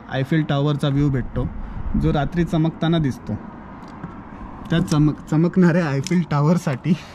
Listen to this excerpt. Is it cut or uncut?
uncut